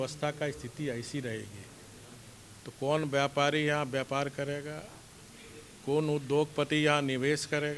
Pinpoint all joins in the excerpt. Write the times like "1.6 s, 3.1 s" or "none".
none